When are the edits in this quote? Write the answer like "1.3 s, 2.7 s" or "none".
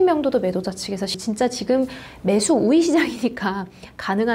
1.1 s